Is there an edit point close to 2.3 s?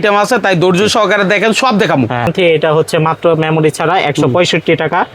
yes; 1 cut; at 2.3 s

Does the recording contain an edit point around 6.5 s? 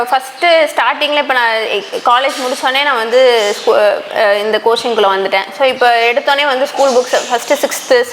no; 0 cuts

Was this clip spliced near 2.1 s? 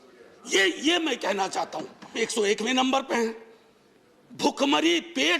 yes; 1 cut; at 2.1 s

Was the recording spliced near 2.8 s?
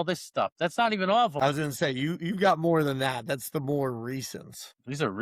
no; 1 cut; at 1.3 s

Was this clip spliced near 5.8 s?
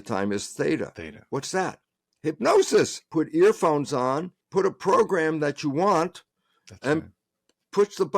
no; 2 cuts; at 3.0 s, 4.3 s

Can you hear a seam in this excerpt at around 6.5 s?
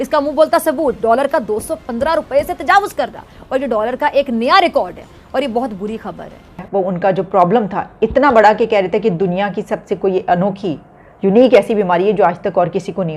yes; 1 cut; at 6.5 s

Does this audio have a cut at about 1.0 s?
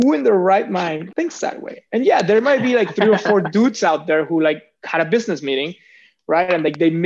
yes; 1 cut; at 1.0 s

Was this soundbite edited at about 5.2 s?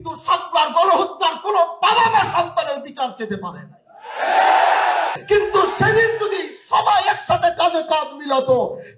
yes; 1 cut; at 5.2 s

